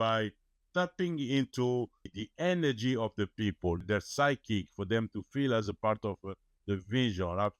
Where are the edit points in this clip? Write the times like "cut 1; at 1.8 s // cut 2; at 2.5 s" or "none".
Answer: cut 1; at 2.1 s // cut 2; at 3.8 s